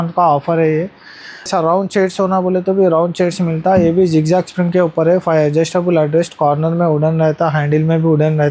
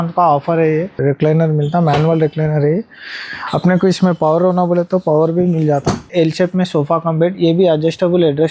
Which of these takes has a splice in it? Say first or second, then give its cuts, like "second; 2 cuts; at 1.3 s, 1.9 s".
second; 2 cuts; at 1.0 s, 6.1 s